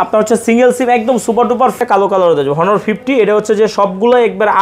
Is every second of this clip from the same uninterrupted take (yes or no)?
no